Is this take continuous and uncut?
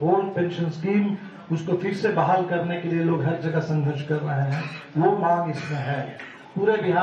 no; 1 cut; at 5.5 s

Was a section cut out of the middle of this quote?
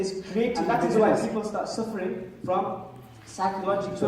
yes; 1 cut; at 1.0 s

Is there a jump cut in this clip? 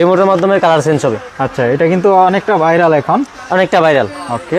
no; 0 cuts

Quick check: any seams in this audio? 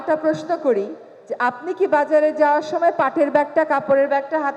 no; 0 cuts

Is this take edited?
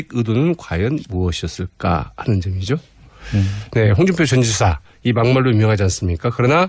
yes; 1 cut; at 4.8 s

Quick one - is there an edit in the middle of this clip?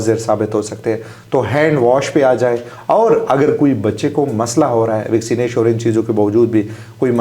no; 0 cuts

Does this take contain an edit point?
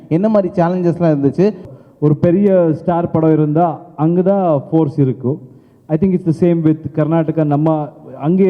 yes; 1 cut; at 1.7 s

